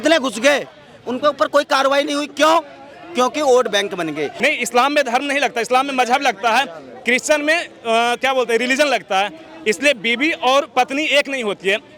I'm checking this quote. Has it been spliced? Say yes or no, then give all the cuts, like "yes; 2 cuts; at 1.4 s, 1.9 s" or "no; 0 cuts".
yes; 1 cut; at 4.3 s